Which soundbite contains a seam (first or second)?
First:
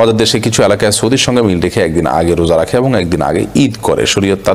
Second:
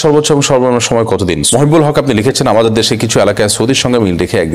second